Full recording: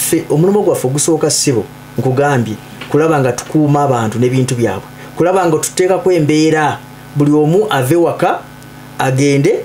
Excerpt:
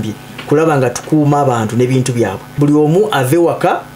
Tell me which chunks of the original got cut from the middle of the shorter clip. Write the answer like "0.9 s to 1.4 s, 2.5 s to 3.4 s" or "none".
4.9 s to 7.0 s